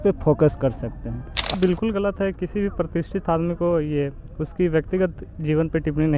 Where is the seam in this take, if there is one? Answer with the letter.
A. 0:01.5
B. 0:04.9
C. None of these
A